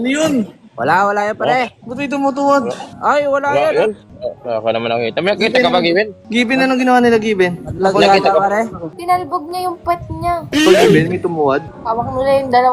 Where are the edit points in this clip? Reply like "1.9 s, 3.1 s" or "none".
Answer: 8.9 s, 10.6 s